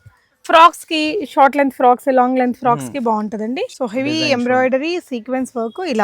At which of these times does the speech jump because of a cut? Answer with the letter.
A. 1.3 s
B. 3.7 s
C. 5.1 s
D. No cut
B